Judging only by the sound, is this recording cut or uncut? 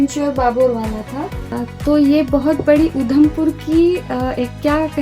cut